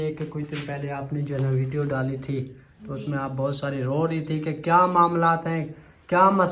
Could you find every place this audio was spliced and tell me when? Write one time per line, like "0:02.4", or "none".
none